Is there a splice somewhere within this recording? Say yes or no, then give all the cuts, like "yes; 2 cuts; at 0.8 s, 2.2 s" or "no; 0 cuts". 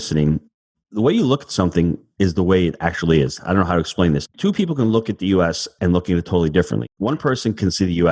yes; 2 cuts; at 4.4 s, 6.8 s